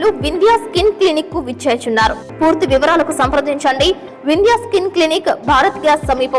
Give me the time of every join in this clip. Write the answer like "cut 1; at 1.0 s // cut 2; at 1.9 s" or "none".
cut 1; at 2.2 s

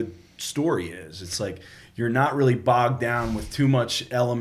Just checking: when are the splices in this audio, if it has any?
none

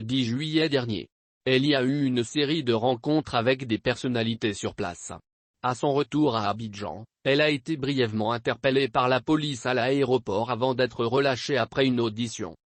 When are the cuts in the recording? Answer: none

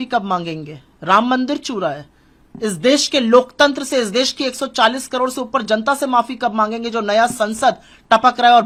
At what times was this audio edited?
none

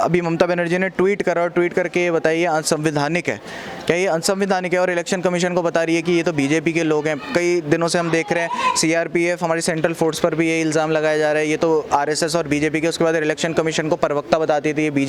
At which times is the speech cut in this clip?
none

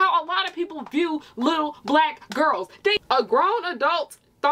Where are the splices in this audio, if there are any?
cut 1; at 3.0 s

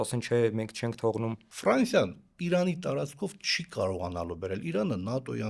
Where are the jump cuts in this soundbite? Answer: cut 1; at 1.5 s

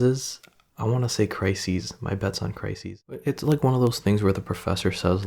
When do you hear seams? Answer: cut 1; at 3.2 s

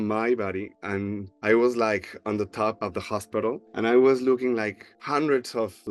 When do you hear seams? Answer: none

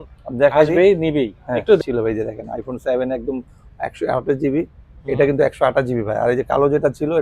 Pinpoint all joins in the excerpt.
cut 1; at 1.8 s

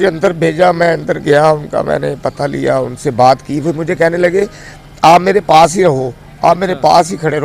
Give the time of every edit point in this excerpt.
none

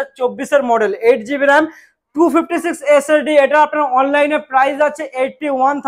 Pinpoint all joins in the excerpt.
none

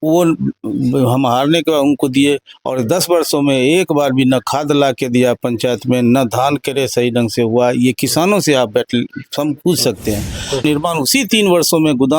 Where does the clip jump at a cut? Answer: cut 1; at 10.6 s

